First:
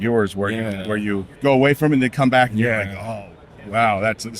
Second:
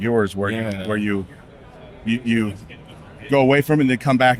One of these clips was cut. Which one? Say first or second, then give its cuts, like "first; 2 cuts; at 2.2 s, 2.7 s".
first; 1 cut; at 1.3 s